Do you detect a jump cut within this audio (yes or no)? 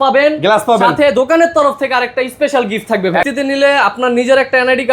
yes